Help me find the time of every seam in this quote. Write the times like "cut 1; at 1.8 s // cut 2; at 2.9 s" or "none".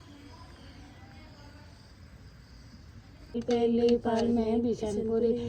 cut 1; at 3.4 s